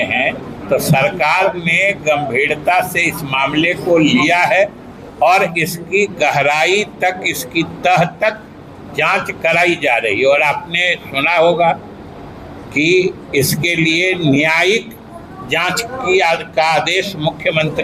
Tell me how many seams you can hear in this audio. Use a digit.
0